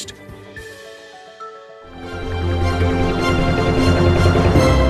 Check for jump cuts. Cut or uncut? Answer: cut